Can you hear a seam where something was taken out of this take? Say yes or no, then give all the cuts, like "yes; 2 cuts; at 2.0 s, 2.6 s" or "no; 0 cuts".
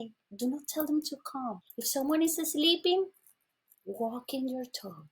yes; 1 cut; at 1.7 s